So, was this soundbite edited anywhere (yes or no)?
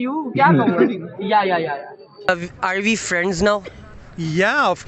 yes